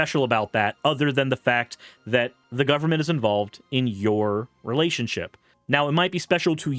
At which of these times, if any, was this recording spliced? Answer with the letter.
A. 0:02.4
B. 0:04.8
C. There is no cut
A